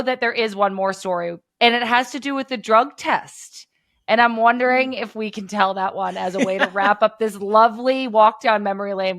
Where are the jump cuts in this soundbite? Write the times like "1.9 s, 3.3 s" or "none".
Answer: 1.4 s